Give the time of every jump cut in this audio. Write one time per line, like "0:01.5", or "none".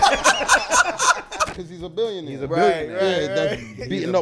0:01.6